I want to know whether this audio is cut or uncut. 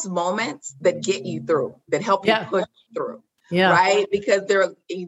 uncut